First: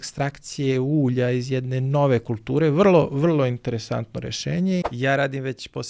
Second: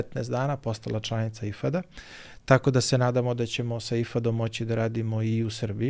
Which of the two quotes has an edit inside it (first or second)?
first